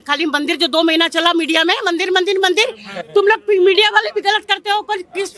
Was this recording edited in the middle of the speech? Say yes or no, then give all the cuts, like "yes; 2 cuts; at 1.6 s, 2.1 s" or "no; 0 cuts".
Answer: no; 0 cuts